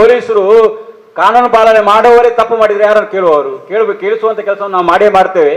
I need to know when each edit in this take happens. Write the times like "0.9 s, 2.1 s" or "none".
none